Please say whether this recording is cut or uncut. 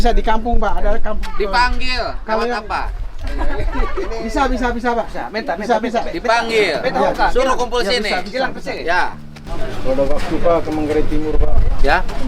cut